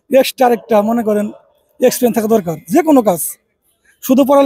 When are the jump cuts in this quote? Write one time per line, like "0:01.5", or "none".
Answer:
none

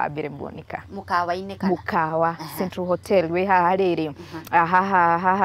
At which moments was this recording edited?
none

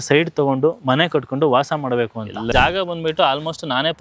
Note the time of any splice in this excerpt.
0:02.5

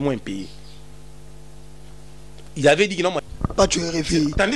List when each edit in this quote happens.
0:03.3

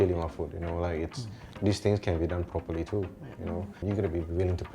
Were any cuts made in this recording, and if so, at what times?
0:03.8

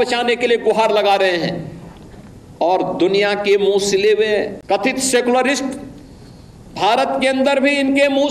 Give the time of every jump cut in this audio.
0:04.6

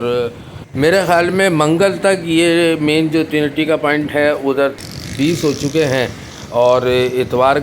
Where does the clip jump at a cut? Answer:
0:04.7

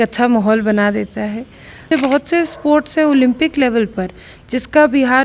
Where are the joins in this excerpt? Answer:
0:01.9

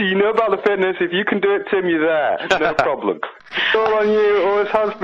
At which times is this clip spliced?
0:03.6

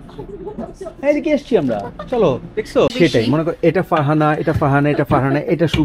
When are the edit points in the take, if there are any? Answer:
0:02.9

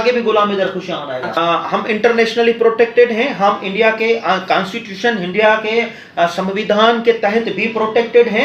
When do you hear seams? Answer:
0:01.3

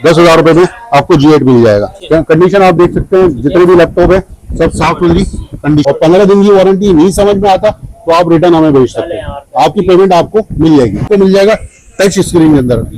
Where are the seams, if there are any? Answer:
0:02.0
0:05.8
0:11.0

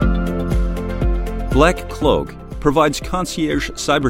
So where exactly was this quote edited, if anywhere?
0:01.5

